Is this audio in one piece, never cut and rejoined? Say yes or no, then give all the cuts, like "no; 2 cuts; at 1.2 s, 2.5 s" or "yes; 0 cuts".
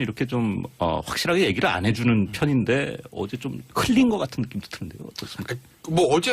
no; 1 cut; at 3.2 s